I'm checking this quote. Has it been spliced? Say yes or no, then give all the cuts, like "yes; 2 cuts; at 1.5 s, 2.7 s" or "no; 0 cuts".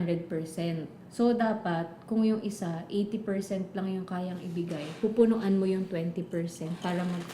yes; 1 cut; at 1.0 s